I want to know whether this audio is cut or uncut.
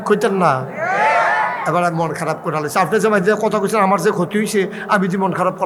uncut